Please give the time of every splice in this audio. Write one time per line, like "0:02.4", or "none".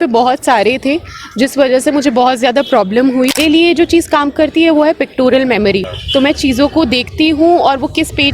0:03.4
0:06.0